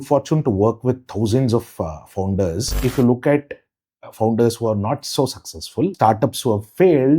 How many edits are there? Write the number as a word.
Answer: two